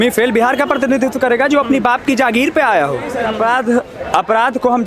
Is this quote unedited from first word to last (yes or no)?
no